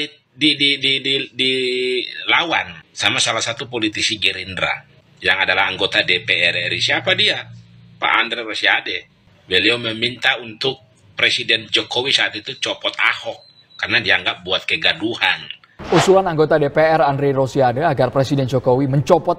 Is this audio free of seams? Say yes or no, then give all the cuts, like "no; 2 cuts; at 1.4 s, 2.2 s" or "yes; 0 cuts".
yes; 0 cuts